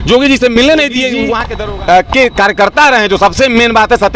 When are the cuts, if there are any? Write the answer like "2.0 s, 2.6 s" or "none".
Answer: 1.4 s